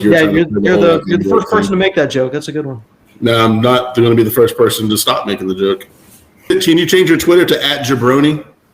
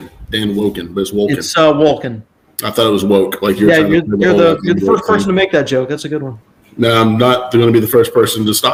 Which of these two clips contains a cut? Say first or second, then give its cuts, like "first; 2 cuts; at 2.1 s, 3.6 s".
first; 1 cut; at 6.5 s